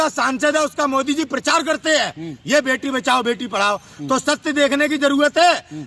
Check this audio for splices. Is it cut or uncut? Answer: uncut